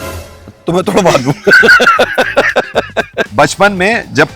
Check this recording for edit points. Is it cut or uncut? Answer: cut